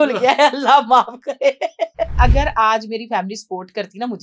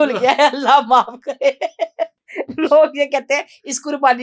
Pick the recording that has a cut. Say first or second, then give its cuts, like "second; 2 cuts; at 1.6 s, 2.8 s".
first; 1 cut; at 2.2 s